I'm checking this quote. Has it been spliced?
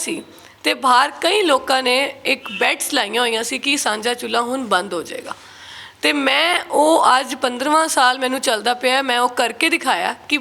no; 0 cuts

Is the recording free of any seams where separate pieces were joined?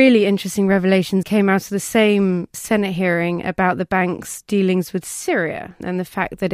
no; 1 cut; at 1.3 s

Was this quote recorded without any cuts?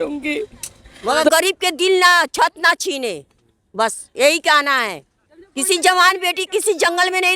no; 1 cut; at 1.3 s

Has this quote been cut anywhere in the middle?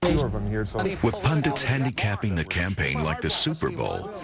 no; 0 cuts

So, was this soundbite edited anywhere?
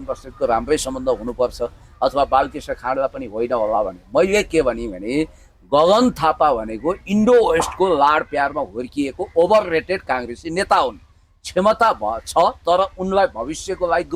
no; 0 cuts

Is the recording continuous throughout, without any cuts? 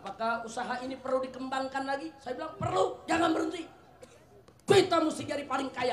yes; 0 cuts

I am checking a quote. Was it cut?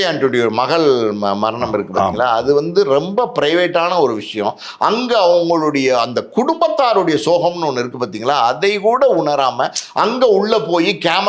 no; 0 cuts

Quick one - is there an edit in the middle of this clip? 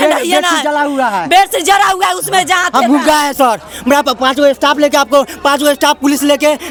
no; 0 cuts

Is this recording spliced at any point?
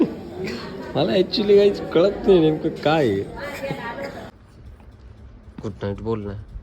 yes; 1 cut; at 4.3 s

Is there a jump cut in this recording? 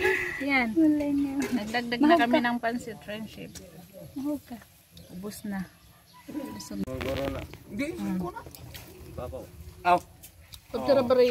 yes; 1 cut; at 6.9 s

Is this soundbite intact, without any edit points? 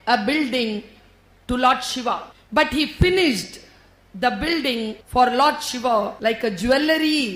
no; 3 cuts; at 2.3 s, 5.0 s, 6.1 s

